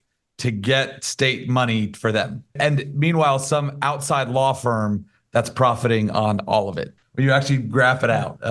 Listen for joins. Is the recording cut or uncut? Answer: cut